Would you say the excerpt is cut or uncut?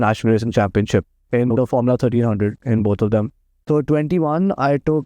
cut